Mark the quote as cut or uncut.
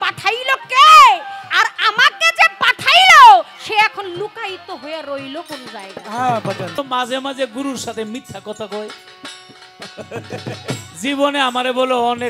cut